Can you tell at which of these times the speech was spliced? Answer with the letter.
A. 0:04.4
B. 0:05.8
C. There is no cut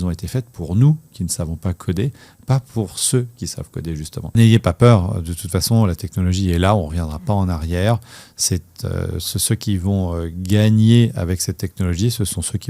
A